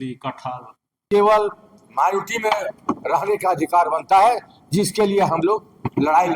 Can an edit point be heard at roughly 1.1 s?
yes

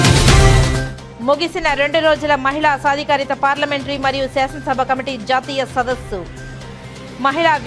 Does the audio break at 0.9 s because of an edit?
yes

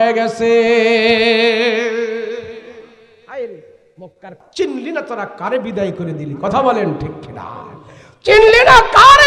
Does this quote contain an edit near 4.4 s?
yes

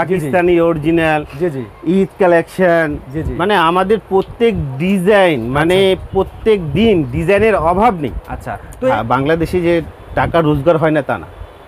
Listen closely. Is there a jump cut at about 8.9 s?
yes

